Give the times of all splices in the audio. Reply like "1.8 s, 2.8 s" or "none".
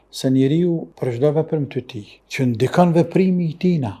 0.9 s